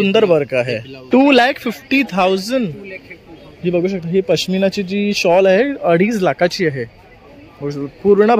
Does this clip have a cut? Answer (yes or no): yes